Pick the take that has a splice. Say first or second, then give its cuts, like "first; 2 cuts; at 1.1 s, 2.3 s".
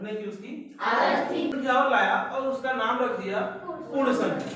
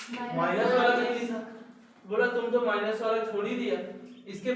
first; 1 cut; at 1.5 s